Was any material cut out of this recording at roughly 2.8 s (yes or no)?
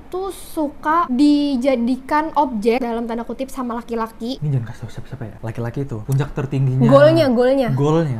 yes